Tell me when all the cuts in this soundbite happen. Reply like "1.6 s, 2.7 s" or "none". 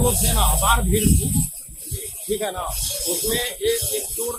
none